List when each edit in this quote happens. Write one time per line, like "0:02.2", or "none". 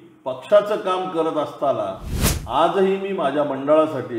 none